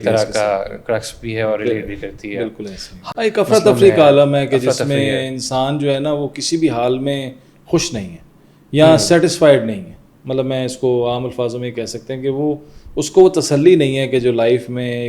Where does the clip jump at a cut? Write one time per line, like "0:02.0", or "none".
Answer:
0:03.0